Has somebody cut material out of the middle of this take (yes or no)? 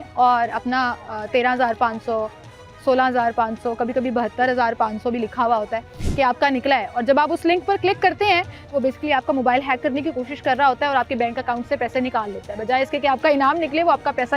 yes